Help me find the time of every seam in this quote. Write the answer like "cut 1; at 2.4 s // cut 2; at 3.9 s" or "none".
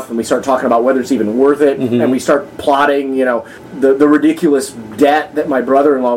cut 1; at 3.5 s